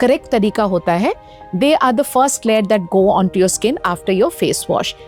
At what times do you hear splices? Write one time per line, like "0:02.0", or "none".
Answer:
none